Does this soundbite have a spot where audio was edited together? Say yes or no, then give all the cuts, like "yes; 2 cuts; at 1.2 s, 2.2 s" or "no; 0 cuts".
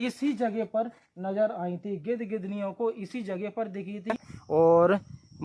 yes; 1 cut; at 4.3 s